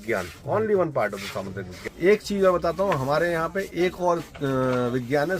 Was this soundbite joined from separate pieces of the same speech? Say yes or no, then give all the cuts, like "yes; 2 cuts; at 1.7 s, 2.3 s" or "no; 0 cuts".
yes; 1 cut; at 1.7 s